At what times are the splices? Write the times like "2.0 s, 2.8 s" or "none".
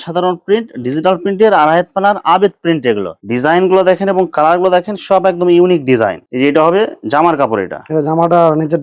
3.1 s, 6.2 s

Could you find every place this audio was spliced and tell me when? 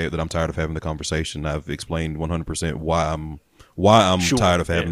none

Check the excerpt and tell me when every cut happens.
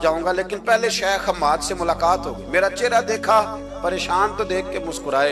none

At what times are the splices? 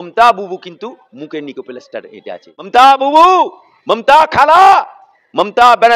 2.7 s

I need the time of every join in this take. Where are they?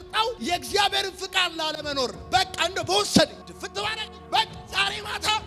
none

